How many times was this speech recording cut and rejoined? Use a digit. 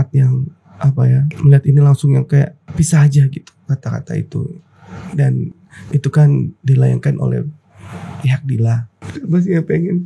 3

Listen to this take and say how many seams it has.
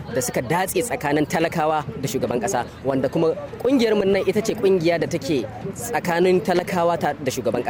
0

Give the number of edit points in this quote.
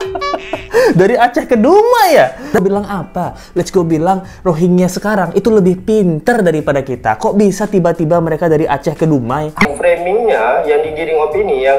2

